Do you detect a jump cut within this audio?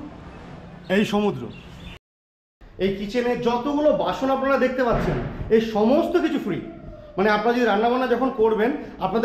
yes; 1 cut; at 2.0 s

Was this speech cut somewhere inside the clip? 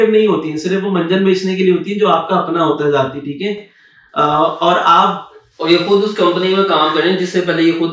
no; 0 cuts

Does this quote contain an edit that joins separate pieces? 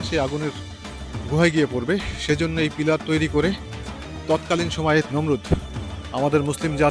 yes; 1 cut; at 5.1 s

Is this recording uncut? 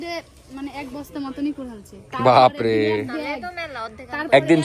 yes; 0 cuts

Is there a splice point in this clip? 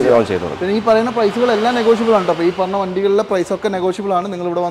no; 0 cuts

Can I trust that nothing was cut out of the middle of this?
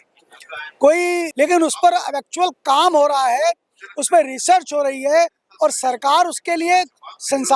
no; 1 cut; at 1.3 s

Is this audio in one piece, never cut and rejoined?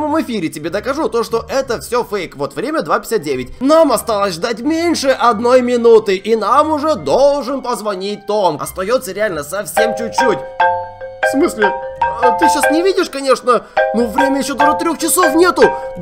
no; 2 cuts; at 3.5 s, 8.6 s

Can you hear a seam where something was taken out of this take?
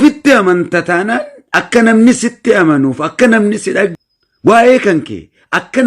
yes; 1 cut; at 3.9 s

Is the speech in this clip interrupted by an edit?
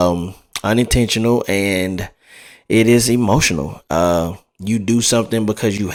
no; 0 cuts

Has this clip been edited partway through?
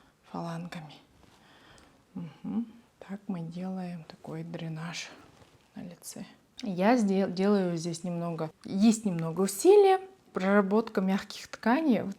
yes; 4 cuts; at 2.9 s, 6.4 s, 8.6 s, 10.2 s

